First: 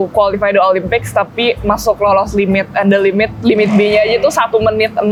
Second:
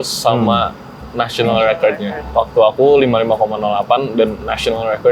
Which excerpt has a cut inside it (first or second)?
second